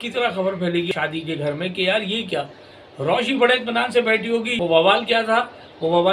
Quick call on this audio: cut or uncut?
cut